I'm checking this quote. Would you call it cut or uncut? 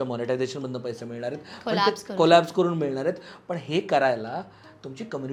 uncut